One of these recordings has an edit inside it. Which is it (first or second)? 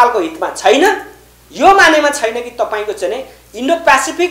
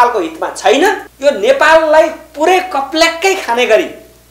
second